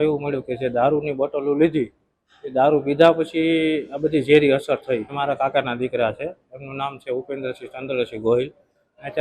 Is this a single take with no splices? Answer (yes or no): no